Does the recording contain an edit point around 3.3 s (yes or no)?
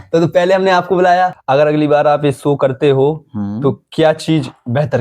no